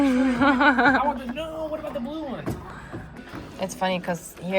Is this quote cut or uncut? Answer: cut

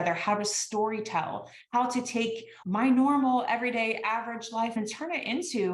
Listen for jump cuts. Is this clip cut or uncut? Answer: cut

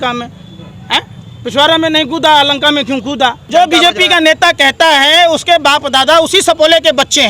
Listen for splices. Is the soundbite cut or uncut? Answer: cut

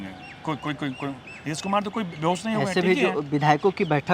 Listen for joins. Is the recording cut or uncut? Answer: uncut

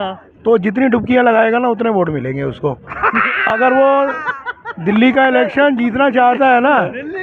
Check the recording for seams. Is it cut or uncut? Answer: uncut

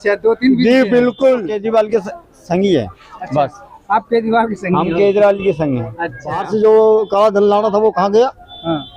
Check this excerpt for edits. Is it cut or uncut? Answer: cut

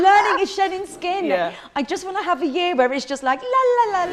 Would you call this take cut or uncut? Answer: uncut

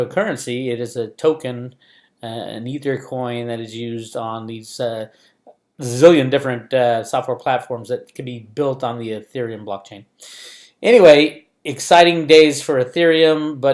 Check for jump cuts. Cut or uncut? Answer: cut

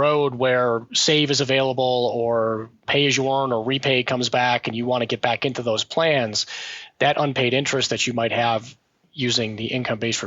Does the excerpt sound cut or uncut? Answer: cut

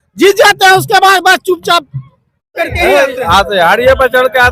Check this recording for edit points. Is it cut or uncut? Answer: cut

